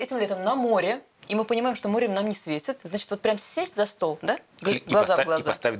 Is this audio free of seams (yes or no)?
yes